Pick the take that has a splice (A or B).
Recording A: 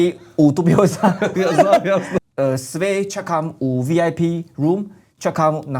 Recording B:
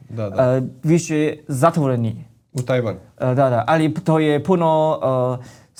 A